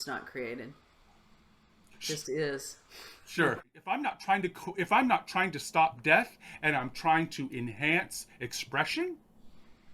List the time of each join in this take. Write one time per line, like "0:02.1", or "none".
0:03.8